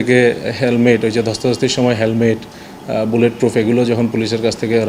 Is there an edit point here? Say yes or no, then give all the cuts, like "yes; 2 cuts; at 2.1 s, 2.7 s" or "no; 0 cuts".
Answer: no; 0 cuts